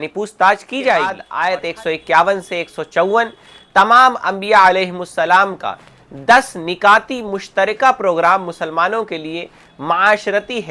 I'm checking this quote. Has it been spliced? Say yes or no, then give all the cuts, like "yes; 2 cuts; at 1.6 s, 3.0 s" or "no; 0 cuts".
yes; 1 cut; at 1.3 s